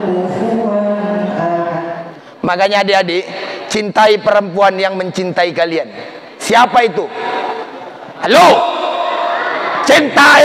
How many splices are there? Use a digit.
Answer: 1